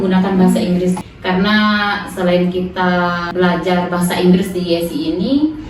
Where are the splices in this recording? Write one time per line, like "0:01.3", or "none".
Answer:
0:01.0
0:03.2